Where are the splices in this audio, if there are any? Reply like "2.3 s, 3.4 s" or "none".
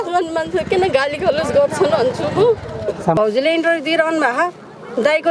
3.2 s